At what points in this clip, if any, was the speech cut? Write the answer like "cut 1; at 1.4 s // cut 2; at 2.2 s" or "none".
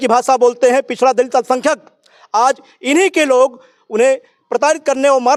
none